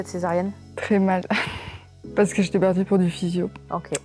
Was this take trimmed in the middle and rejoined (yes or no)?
yes